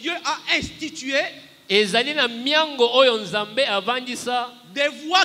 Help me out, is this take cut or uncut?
uncut